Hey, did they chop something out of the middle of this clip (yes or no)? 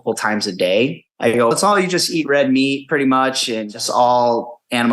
yes